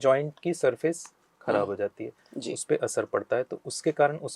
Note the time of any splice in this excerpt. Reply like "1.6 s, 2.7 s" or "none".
none